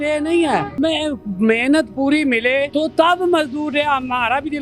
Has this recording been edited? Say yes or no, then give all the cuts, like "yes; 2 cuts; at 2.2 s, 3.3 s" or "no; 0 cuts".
yes; 2 cuts; at 0.8 s, 2.7 s